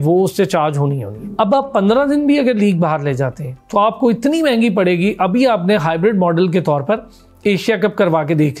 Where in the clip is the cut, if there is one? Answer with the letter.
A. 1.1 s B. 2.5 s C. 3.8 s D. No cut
A